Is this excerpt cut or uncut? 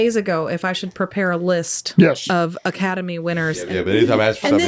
cut